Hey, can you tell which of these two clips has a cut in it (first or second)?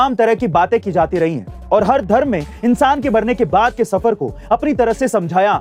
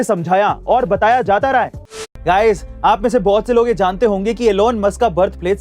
second